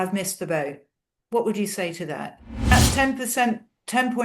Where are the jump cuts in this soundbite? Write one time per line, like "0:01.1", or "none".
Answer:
0:02.7